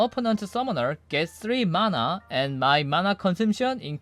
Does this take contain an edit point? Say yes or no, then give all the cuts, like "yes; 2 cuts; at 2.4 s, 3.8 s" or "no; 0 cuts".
no; 0 cuts